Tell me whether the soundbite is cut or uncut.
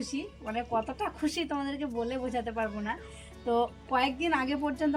uncut